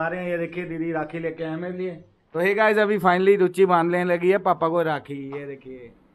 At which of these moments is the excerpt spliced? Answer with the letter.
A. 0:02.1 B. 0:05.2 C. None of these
A